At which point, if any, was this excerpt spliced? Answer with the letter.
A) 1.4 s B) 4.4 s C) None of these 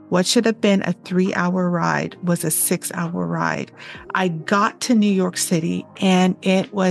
B